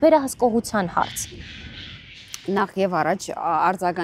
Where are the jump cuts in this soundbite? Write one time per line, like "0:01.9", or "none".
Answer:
none